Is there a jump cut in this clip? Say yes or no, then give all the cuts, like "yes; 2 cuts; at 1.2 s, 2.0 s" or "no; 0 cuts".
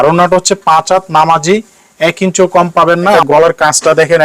yes; 1 cut; at 3.2 s